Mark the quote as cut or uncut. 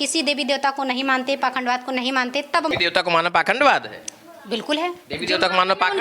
cut